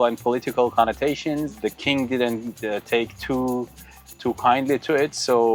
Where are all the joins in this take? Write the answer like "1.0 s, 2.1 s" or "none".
none